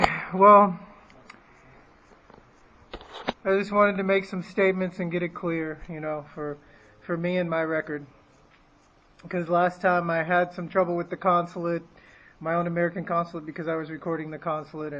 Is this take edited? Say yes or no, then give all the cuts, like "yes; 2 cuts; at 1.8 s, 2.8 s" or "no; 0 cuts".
yes; 1 cut; at 7.4 s